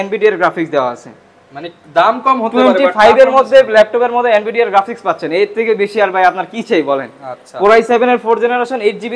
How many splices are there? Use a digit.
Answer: 0